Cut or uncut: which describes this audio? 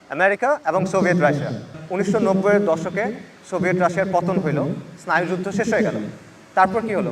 cut